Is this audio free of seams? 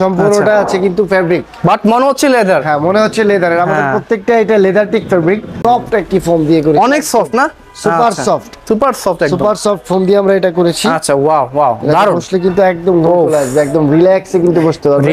no; 1 cut; at 5.6 s

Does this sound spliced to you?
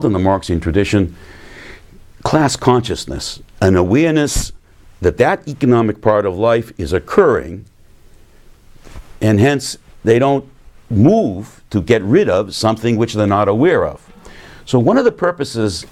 no; 0 cuts

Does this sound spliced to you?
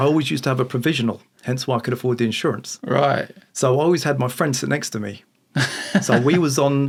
no; 0 cuts

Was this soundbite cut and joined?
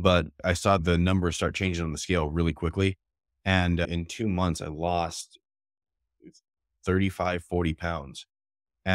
yes; 2 cuts; at 0.7 s, 3.9 s

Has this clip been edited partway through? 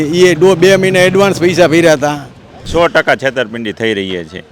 yes; 1 cut; at 2.6 s

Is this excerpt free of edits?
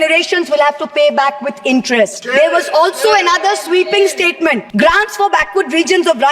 no; 2 cuts; at 2.2 s, 4.7 s

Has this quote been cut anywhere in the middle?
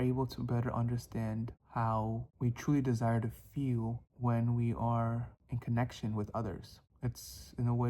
yes; 3 cuts; at 1.6 s, 2.3 s, 4.0 s

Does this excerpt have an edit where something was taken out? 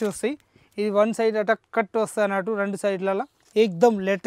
yes; 1 cut; at 3.4 s

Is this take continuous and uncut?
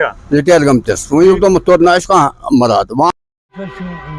no; 1 cut; at 2.9 s

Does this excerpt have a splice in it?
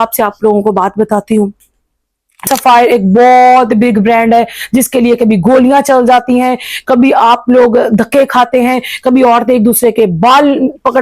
yes; 1 cut; at 2.4 s

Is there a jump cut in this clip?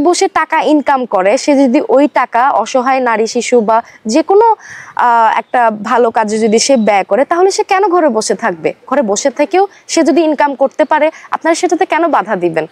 no; 0 cuts

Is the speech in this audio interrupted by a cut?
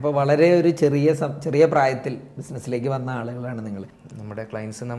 yes; 1 cut; at 4.0 s

